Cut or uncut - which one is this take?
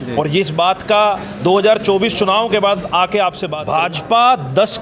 cut